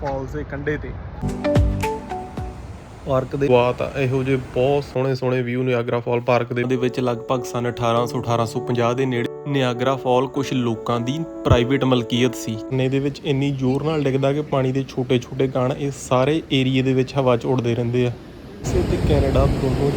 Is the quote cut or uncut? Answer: cut